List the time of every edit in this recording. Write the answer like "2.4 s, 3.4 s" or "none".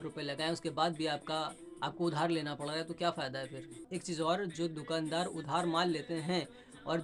none